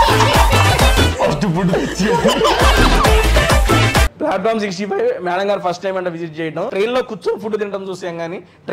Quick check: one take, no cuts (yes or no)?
no